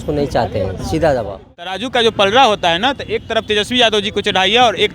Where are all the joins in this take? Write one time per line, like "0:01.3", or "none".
0:01.8